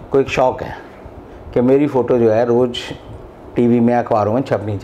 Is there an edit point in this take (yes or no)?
no